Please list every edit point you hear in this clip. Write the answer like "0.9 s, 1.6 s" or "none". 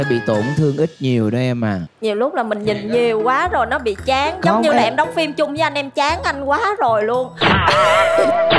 none